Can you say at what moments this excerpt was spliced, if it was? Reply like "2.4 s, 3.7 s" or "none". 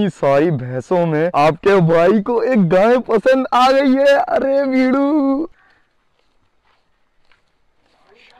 1.3 s, 5.5 s